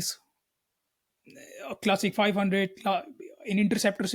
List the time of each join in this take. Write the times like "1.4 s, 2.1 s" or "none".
none